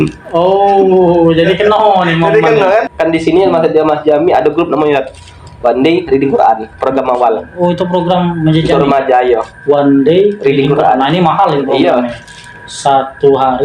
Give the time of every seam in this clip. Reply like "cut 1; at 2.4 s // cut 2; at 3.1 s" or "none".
cut 1; at 2.9 s

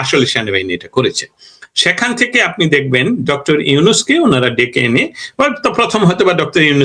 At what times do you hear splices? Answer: none

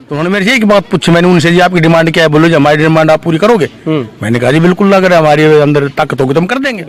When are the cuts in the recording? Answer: none

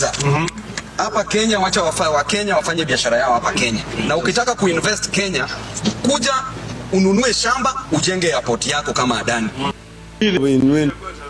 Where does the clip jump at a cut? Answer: cut 1; at 9.7 s

